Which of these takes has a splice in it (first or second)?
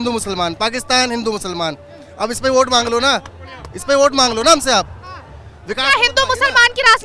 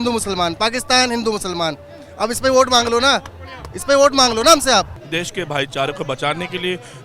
second